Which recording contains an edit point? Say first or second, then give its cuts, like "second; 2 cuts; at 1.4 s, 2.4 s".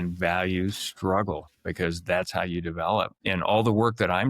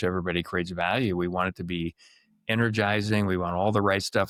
first; 1 cut; at 3.2 s